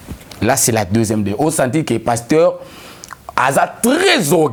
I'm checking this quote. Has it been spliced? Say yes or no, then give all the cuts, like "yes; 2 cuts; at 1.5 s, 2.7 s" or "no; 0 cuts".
no; 0 cuts